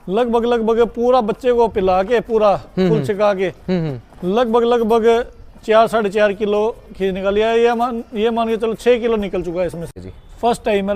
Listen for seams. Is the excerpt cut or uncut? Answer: cut